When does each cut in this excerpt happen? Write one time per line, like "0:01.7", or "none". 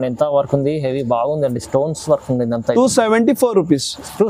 none